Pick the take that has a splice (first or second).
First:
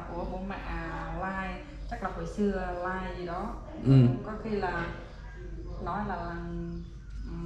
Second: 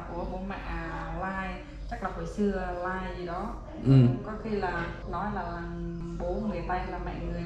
second